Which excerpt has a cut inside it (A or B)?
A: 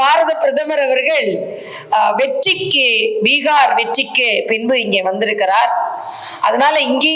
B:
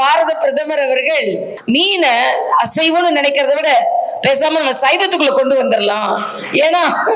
B